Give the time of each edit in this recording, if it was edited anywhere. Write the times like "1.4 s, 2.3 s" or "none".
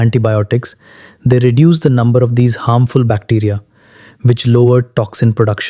none